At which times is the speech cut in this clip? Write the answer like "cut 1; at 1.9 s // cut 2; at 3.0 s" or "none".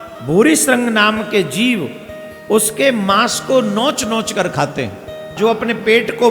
cut 1; at 5.3 s